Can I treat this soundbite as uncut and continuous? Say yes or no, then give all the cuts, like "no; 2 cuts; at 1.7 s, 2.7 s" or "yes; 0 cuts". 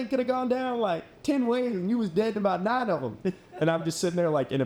yes; 0 cuts